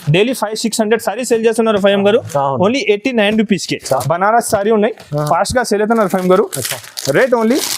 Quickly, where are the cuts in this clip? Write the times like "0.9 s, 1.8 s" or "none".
4.0 s